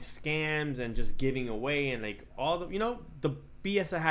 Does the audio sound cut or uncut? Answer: uncut